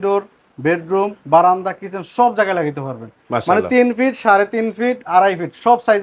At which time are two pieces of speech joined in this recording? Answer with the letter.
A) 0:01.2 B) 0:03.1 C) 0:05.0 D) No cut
D